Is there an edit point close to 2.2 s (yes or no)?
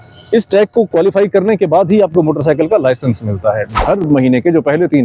no